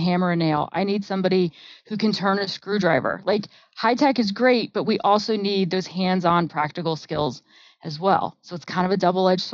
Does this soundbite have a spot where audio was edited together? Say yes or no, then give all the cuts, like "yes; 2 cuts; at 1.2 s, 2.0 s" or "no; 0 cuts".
no; 0 cuts